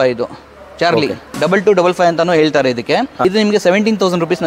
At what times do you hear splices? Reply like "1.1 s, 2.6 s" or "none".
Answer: 1.2 s, 3.1 s